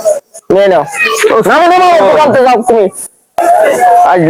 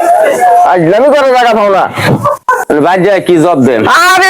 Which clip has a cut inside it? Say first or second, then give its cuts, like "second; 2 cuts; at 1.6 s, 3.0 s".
second; 1 cut; at 2.6 s